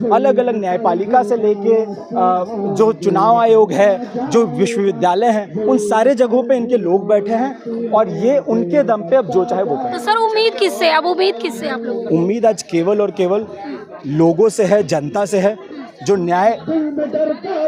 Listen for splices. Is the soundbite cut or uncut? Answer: uncut